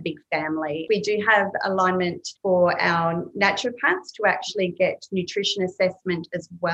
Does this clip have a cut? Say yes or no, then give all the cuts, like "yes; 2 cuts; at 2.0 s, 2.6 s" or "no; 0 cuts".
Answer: yes; 2 cuts; at 0.8 s, 2.3 s